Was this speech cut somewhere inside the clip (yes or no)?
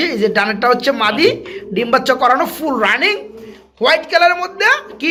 no